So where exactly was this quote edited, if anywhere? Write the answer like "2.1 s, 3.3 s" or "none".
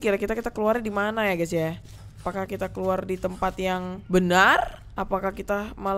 2.2 s, 4.0 s, 4.8 s